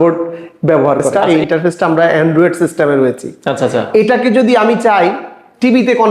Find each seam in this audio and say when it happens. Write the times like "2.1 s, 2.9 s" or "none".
1.1 s